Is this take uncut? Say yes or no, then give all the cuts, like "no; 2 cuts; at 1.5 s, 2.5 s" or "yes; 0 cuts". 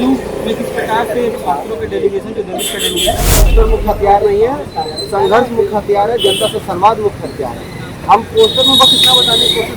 no; 1 cut; at 3.5 s